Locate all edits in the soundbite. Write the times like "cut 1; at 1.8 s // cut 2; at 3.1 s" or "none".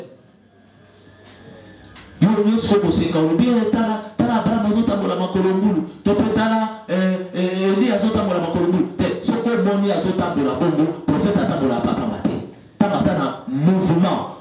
none